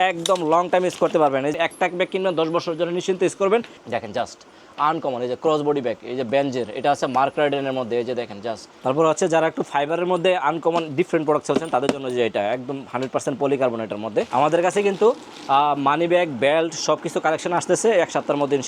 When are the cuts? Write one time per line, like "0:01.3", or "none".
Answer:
0:01.5
0:03.8
0:08.7
0:14.3